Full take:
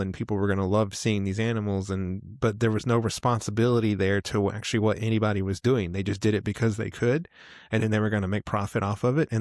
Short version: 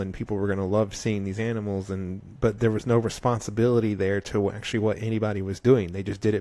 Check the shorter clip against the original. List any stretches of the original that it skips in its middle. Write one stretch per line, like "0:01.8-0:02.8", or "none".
none